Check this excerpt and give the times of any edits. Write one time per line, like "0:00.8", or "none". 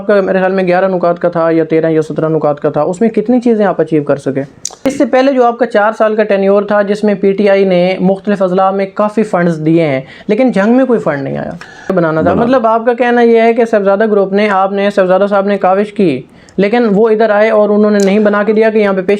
0:04.8
0:11.9